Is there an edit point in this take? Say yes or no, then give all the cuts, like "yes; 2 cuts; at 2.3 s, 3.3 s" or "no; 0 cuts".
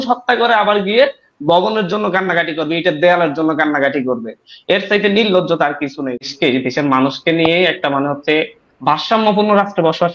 yes; 1 cut; at 6.3 s